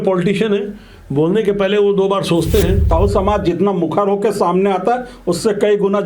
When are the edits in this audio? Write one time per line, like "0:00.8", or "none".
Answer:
0:02.9